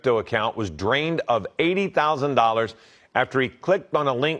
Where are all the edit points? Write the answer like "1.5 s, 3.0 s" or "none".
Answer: none